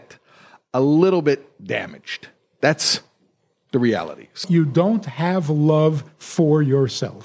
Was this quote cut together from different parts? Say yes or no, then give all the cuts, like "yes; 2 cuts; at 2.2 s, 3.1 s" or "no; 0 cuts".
yes; 1 cut; at 4.4 s